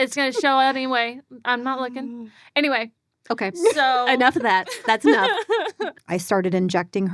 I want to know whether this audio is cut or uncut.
cut